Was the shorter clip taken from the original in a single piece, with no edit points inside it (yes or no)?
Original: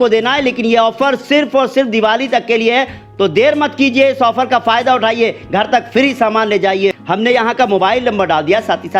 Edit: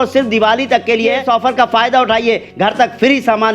no